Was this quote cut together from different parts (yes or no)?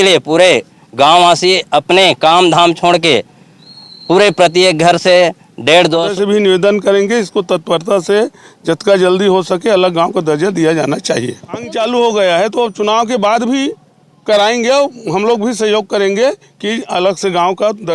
yes